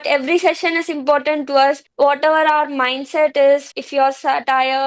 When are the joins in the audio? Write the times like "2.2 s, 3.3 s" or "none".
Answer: 1.9 s, 3.8 s